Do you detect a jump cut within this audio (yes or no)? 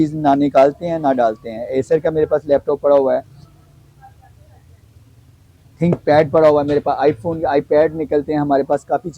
no